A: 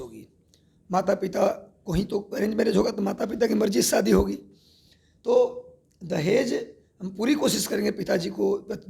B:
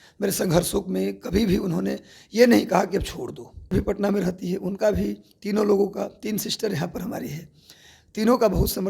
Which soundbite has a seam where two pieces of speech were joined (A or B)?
B